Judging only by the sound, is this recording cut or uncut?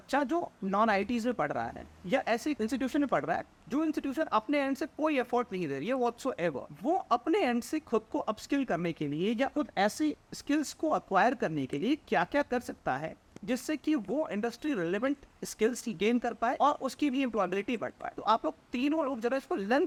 uncut